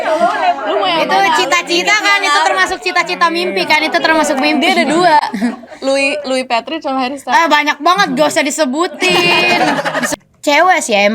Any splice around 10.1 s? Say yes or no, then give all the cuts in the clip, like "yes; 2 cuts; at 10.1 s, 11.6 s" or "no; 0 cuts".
yes; 1 cut; at 10.1 s